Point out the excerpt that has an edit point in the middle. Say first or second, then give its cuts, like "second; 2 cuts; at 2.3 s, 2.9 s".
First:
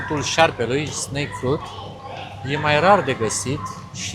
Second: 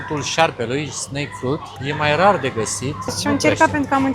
second; 2 cuts; at 1.7 s, 3.2 s